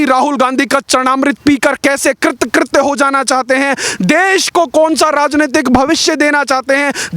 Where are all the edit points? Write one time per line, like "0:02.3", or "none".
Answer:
none